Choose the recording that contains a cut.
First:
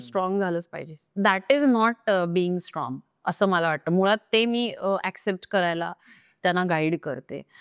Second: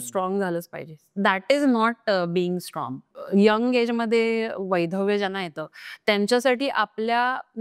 second; 1 cut; at 3.1 s

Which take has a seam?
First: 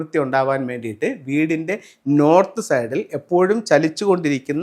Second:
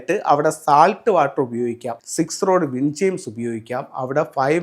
second; 1 cut; at 2.0 s

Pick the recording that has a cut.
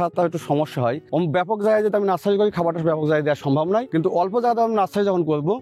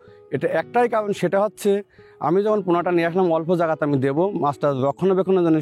first; 1 cut; at 3.9 s

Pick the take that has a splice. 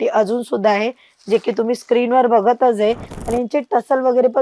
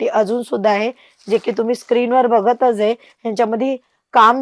first; 1 cut; at 3.1 s

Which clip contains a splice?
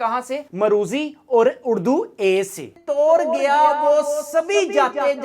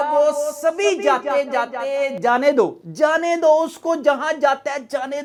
first; 1 cut; at 2.8 s

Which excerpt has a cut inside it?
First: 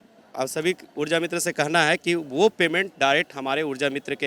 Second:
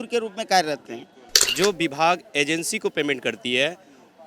second; 1 cut; at 1.4 s

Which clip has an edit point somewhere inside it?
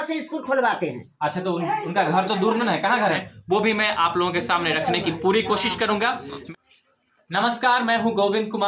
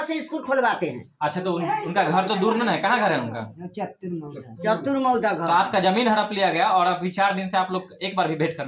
first; 2 cuts; at 3.2 s, 6.4 s

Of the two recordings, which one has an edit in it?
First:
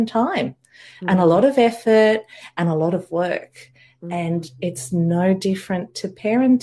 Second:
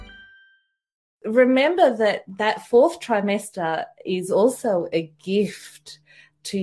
second; 1 cut; at 1.1 s

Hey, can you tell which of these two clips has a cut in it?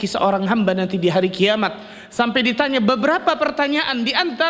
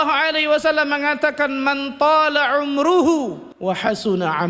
second; 1 cut; at 3.5 s

